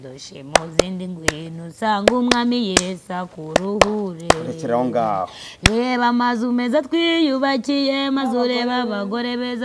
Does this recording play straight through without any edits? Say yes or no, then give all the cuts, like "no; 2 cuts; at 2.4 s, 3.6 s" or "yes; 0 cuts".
yes; 0 cuts